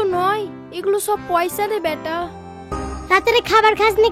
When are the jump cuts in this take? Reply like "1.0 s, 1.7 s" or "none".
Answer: 2.7 s